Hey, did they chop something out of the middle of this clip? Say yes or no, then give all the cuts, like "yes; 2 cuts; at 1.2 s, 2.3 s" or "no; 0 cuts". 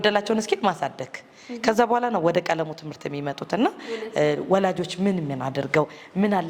no; 0 cuts